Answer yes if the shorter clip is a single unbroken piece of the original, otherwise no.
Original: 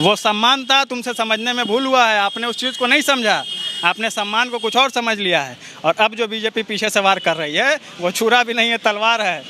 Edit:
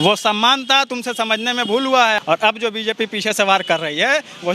no